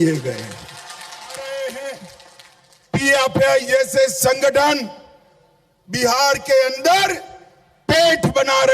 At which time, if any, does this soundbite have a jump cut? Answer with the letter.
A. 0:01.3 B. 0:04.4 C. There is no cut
A